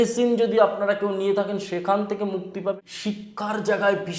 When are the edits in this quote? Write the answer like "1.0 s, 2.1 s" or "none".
2.9 s